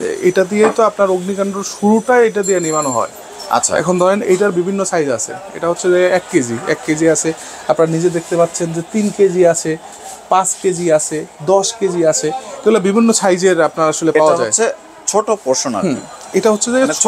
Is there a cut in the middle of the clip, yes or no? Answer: no